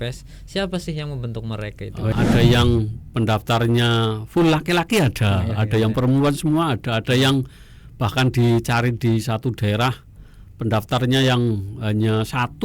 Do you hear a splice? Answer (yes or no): yes